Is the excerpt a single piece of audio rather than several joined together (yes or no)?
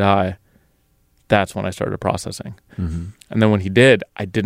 no